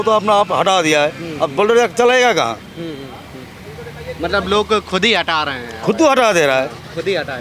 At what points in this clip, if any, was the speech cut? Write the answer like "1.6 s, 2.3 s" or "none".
none